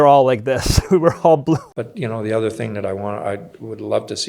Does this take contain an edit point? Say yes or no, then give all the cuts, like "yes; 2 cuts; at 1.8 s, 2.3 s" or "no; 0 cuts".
yes; 1 cut; at 1.6 s